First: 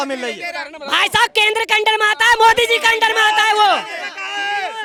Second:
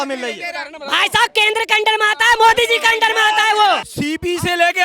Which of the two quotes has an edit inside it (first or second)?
second